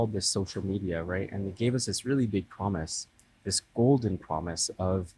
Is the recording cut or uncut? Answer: uncut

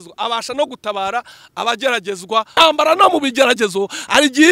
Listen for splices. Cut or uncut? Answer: cut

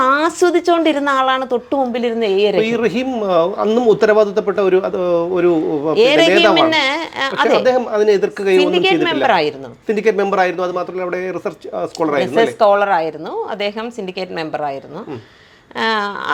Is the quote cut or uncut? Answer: uncut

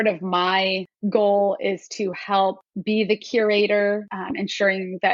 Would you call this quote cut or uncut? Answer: cut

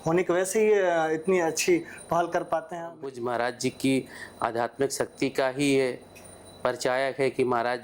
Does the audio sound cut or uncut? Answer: cut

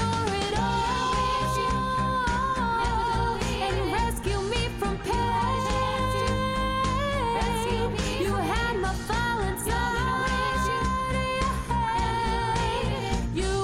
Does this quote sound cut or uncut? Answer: uncut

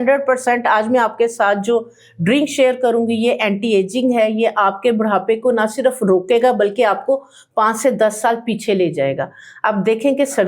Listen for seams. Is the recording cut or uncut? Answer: uncut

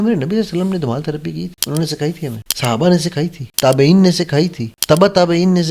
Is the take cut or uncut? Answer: cut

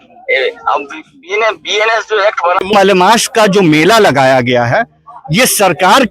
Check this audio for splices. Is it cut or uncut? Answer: cut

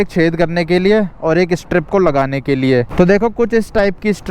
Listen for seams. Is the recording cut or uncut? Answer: cut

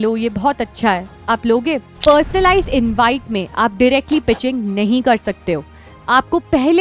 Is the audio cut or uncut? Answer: cut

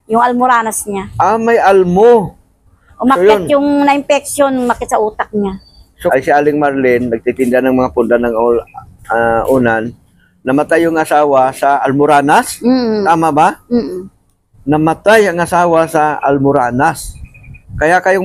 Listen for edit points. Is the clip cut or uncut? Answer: cut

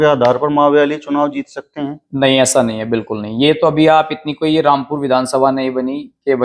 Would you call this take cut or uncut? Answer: uncut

